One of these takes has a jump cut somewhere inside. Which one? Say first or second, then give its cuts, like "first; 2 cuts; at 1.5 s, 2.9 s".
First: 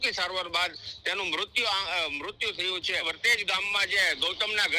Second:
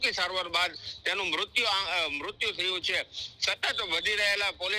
first; 1 cut; at 3.0 s